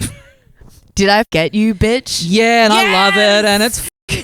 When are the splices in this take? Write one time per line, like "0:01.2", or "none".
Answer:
0:01.3